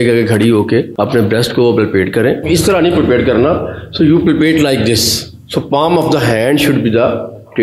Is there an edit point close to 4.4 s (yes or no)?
no